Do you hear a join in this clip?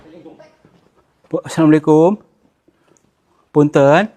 no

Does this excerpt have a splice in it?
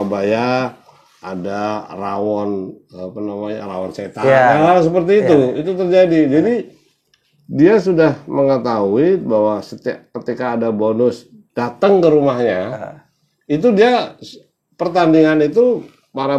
no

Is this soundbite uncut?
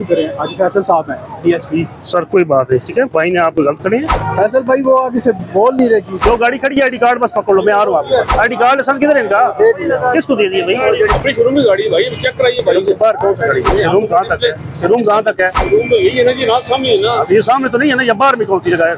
no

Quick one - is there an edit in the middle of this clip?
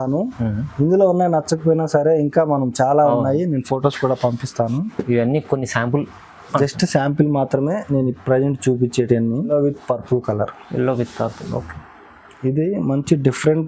yes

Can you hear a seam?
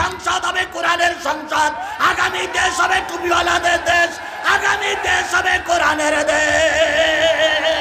no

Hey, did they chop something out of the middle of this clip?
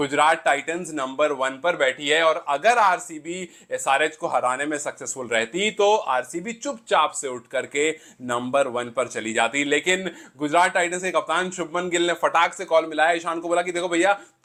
no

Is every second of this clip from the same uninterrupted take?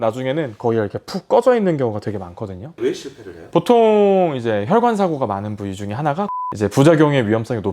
no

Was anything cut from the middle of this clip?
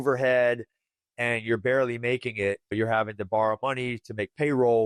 no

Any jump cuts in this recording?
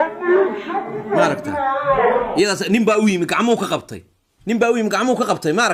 no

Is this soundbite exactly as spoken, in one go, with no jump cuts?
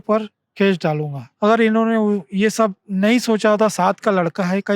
no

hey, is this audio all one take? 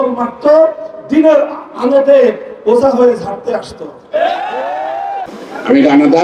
no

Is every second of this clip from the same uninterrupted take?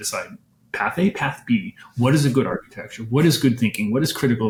yes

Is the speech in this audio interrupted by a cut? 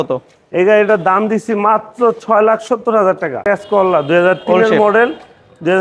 yes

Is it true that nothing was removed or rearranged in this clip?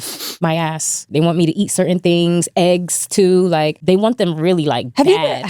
no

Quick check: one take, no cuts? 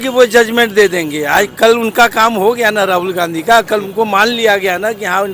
yes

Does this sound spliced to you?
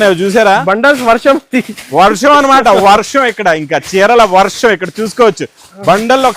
no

